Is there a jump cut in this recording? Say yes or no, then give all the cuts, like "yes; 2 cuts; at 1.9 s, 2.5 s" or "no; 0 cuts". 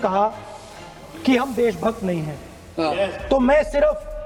no; 0 cuts